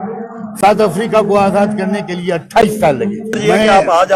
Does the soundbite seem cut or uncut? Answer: uncut